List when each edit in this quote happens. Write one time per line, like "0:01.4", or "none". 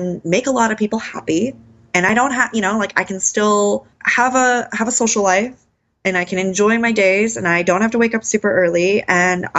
0:04.0